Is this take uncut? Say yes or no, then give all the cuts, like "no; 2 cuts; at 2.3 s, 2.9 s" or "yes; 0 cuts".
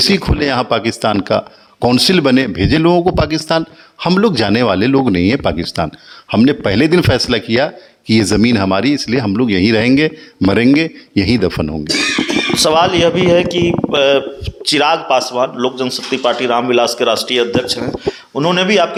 yes; 0 cuts